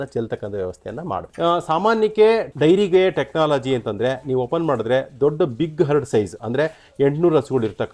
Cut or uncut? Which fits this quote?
cut